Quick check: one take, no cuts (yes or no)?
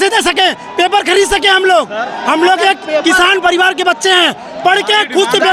yes